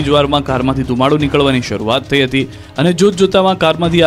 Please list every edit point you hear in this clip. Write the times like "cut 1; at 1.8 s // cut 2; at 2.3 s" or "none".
none